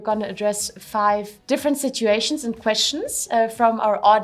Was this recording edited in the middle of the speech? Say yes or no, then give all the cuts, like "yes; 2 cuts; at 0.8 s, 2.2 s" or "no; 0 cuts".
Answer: yes; 1 cut; at 1.3 s